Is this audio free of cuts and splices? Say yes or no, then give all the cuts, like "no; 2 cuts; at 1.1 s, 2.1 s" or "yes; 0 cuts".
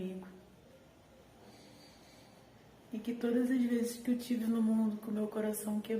no; 1 cut; at 1.2 s